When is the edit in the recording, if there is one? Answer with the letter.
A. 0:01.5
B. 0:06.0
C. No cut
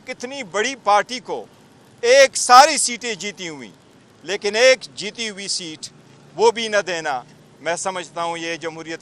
C